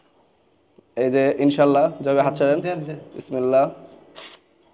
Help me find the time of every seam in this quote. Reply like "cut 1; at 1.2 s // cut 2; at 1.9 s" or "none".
none